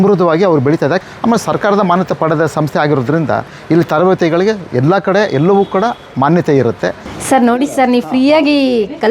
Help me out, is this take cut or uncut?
cut